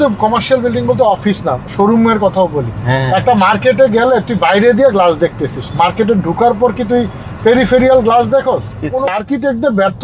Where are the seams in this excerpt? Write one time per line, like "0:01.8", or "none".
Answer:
0:09.1